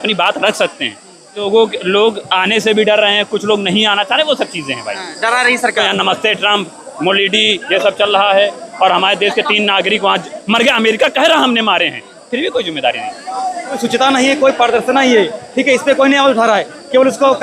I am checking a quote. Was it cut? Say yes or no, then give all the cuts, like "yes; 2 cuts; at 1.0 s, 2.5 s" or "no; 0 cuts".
yes; 3 cuts; at 1.4 s, 5.8 s, 13.8 s